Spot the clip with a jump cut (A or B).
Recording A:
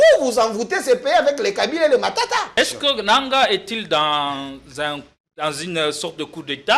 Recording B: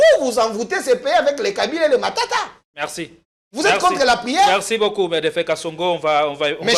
A